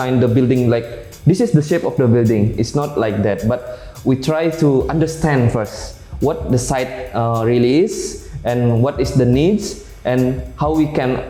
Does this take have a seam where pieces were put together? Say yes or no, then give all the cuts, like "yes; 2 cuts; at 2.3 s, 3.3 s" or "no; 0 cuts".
no; 0 cuts